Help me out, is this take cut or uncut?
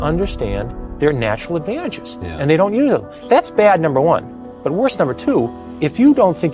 cut